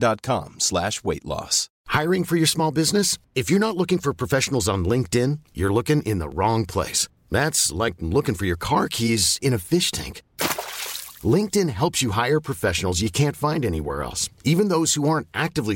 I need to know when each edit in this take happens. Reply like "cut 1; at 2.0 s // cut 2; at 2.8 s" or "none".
none

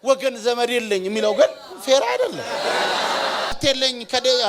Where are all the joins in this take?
cut 1; at 3.6 s

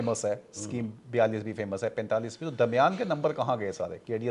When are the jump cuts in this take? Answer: none

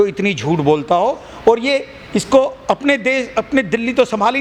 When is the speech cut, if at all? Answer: none

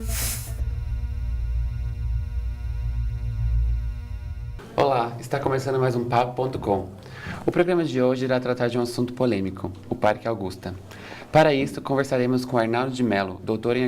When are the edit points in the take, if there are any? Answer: cut 1; at 4.6 s

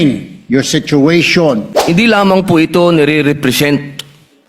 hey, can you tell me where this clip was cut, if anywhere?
cut 1; at 1.7 s

